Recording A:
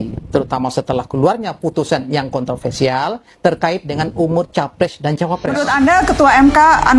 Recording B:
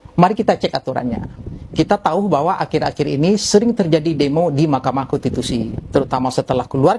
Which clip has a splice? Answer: A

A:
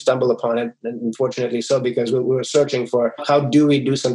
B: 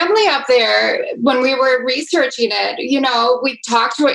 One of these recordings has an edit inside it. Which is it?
A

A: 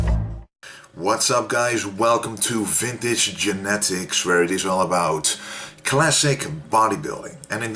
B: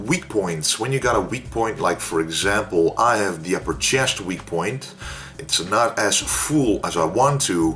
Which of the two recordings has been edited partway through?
B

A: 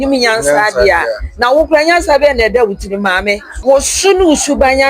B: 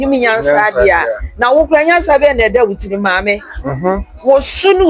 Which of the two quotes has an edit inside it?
A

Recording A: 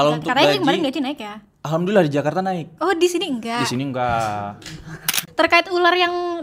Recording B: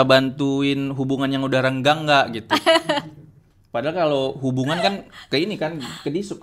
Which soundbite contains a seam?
A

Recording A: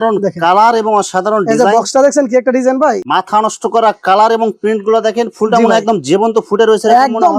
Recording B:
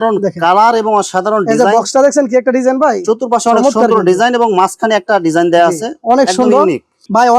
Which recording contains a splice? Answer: A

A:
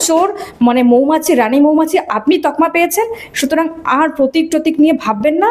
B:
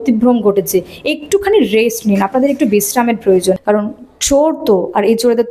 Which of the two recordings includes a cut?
B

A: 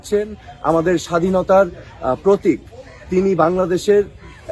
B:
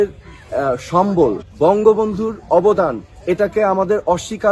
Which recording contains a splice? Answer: B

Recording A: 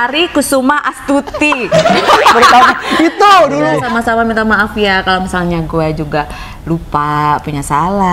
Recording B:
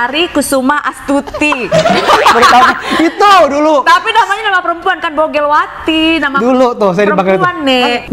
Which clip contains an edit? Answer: A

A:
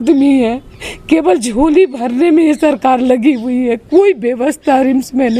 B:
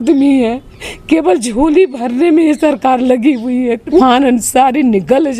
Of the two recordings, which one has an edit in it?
B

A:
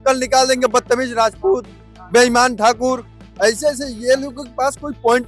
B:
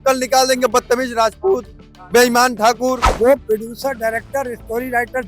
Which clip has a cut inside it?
B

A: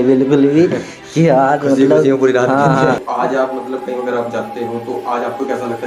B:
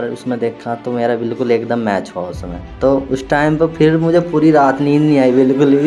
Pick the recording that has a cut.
A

